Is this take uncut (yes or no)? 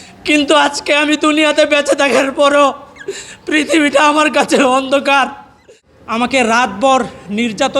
no